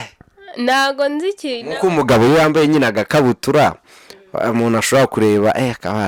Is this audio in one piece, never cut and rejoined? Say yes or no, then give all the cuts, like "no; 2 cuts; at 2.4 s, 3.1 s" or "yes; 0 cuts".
yes; 0 cuts